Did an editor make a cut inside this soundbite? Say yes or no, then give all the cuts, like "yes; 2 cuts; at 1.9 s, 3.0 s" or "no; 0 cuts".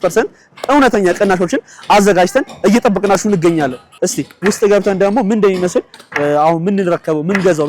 no; 0 cuts